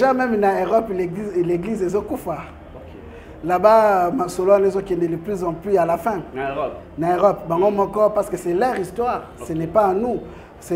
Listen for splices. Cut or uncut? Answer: uncut